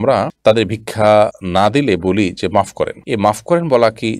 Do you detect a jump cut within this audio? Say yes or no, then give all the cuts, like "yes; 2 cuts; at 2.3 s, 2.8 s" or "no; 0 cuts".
yes; 1 cut; at 1.4 s